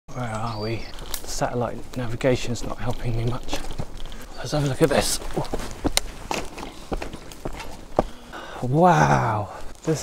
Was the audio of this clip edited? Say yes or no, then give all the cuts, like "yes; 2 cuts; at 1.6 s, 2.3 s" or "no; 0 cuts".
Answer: yes; 1 cut; at 1.0 s